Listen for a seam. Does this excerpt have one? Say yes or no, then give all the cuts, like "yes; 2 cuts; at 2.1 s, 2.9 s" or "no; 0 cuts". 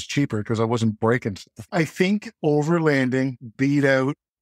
yes; 1 cut; at 1.7 s